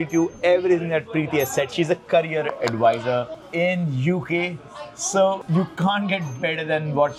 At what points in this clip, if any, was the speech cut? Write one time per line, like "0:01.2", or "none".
none